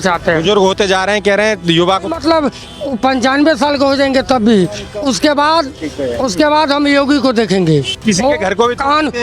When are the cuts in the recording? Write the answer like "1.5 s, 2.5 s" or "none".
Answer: 7.9 s

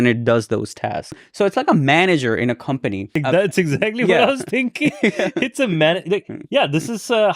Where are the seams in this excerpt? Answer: 1.2 s, 3.2 s

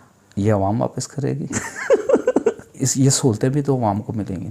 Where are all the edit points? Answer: 2.8 s

